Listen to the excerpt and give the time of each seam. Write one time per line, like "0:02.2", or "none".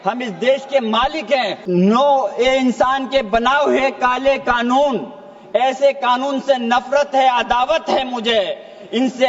0:01.6